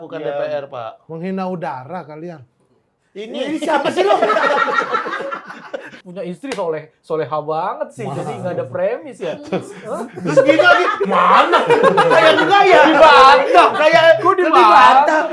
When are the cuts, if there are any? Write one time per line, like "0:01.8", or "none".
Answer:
0:05.9